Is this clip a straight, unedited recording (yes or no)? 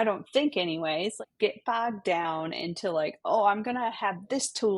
no